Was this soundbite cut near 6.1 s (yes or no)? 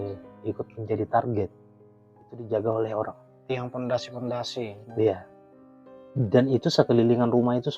no